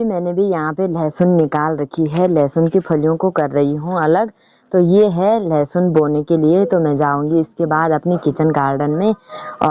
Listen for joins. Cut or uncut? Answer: uncut